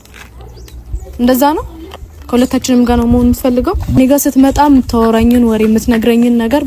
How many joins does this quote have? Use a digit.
1